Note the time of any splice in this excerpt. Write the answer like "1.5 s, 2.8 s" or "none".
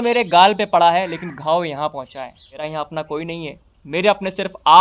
2.5 s